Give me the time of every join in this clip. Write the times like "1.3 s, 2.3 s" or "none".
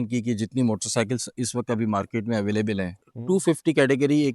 3.1 s